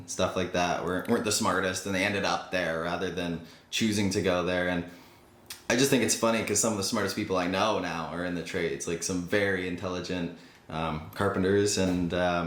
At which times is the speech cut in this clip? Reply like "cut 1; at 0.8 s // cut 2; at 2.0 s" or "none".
none